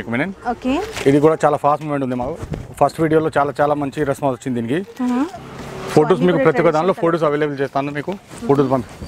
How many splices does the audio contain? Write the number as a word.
one